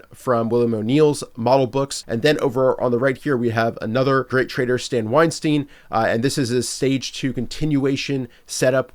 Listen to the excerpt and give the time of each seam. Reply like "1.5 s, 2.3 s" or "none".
2.0 s, 4.3 s